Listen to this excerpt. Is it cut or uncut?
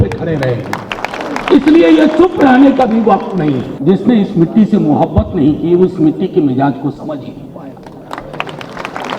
cut